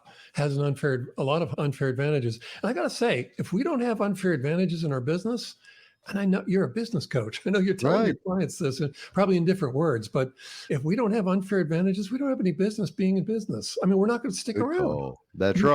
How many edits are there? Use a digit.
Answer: 1